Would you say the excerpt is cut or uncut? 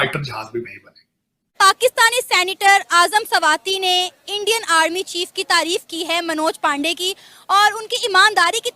cut